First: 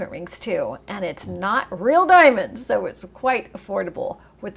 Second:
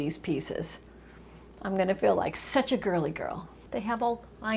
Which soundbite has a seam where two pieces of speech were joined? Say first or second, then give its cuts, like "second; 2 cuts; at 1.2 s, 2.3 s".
second; 1 cut; at 3.6 s